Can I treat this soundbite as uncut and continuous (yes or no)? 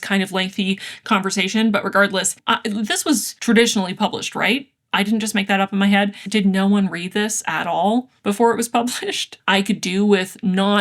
no